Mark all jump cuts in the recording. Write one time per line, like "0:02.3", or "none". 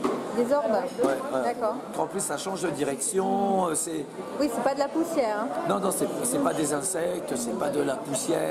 0:01.9